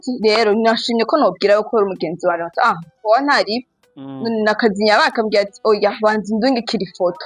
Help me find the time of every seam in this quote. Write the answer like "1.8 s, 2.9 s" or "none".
none